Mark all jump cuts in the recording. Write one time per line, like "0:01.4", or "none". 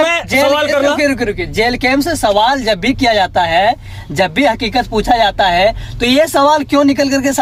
none